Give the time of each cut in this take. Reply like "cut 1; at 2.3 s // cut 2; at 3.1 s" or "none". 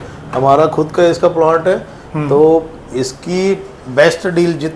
none